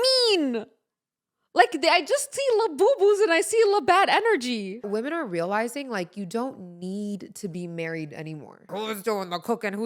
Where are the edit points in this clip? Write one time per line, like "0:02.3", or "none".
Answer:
0:04.9
0:08.7